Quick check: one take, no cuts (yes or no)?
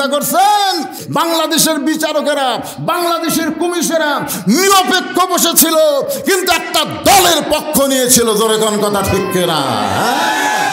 no